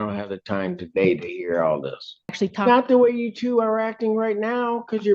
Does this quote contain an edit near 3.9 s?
no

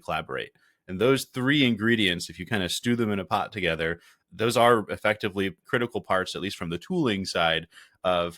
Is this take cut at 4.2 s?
yes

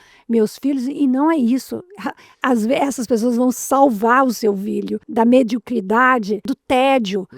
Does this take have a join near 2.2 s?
no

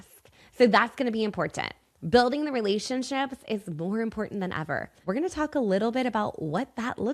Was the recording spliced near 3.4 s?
no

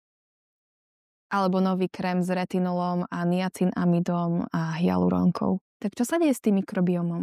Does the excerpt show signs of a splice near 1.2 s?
no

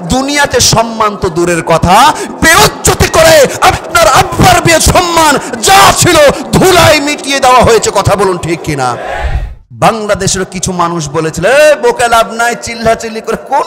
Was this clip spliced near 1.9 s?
no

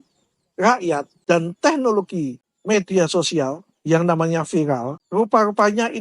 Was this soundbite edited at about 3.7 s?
no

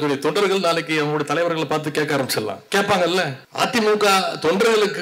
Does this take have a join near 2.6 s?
yes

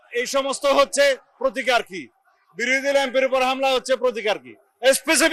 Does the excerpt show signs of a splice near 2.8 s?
no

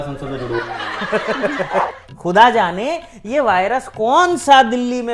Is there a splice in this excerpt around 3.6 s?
no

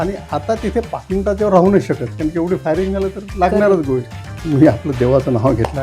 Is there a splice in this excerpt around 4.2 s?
yes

